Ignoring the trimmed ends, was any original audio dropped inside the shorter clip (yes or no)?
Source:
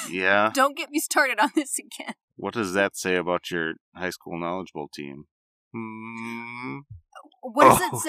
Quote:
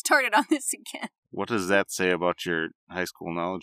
no